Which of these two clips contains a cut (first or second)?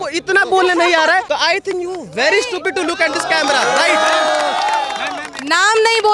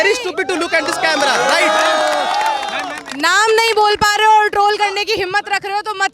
first